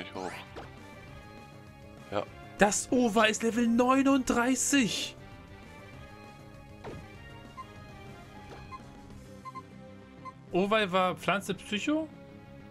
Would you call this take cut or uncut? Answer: cut